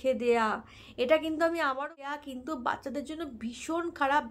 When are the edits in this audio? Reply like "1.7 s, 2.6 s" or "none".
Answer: 2.2 s